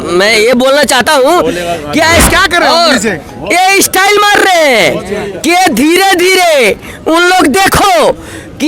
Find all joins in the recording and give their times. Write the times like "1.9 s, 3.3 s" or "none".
2.3 s